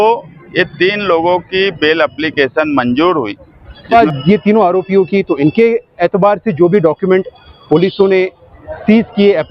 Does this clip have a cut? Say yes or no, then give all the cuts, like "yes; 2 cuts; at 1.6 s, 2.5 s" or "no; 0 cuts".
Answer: yes; 1 cut; at 3.9 s